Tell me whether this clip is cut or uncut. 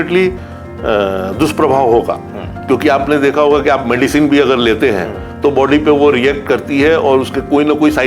uncut